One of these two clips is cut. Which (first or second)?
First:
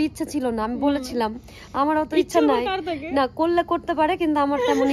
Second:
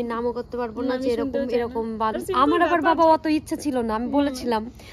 second